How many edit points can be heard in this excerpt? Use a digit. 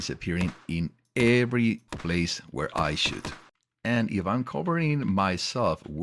0